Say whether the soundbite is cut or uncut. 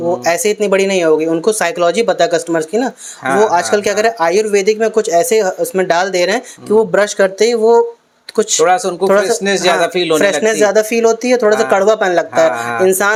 uncut